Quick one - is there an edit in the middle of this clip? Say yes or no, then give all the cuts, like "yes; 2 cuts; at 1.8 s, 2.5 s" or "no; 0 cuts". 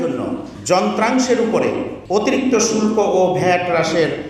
no; 0 cuts